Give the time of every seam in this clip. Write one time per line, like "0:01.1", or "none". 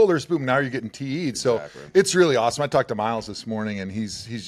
none